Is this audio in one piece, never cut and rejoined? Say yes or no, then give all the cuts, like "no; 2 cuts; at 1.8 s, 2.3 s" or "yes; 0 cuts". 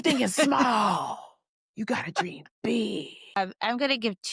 no; 1 cut; at 3.4 s